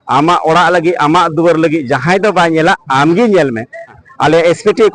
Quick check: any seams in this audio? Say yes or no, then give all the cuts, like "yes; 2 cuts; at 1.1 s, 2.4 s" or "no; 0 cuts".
yes; 1 cut; at 4.0 s